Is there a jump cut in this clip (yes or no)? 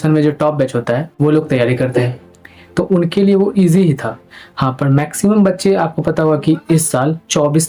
no